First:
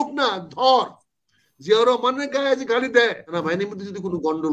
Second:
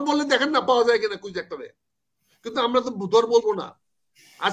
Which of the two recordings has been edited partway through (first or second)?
first